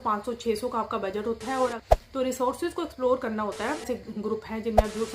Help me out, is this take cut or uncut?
cut